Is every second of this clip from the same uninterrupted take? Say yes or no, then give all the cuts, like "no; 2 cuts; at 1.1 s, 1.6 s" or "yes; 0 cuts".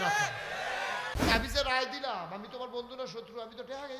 no; 1 cut; at 1.1 s